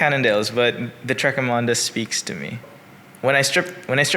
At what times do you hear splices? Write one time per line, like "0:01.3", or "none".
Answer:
0:02.6